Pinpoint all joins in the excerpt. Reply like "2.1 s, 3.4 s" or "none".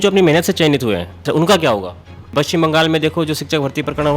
1.2 s, 2.3 s

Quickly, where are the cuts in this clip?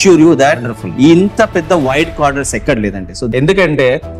3.3 s

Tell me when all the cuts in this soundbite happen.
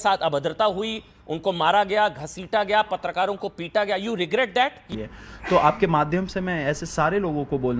4.8 s

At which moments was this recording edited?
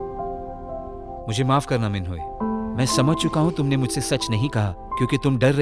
none

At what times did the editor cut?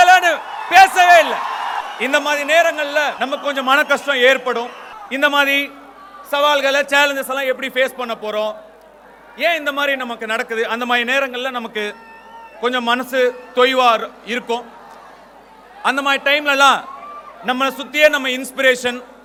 none

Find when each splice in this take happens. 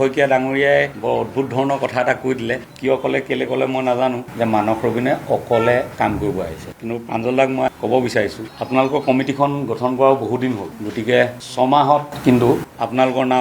4.3 s, 6.7 s

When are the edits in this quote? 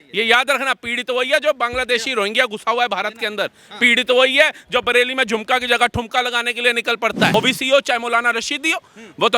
7.3 s

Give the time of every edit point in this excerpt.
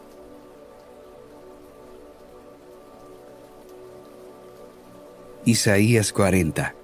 none

